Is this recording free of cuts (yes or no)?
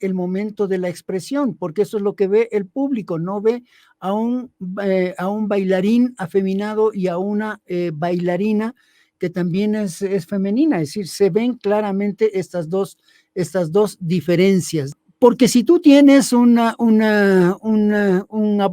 no